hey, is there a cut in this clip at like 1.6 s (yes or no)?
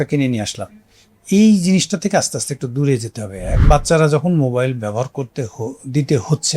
no